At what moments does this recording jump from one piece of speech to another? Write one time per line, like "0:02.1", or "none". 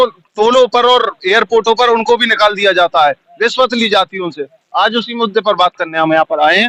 none